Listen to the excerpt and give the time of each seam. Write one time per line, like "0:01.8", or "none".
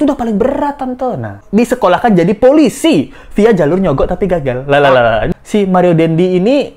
0:01.4
0:05.2